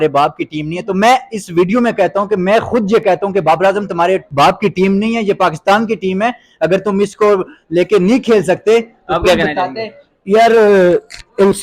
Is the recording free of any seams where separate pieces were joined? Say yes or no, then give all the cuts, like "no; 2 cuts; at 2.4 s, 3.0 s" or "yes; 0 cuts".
no; 1 cut; at 4.3 s